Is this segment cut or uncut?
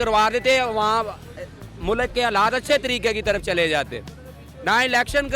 uncut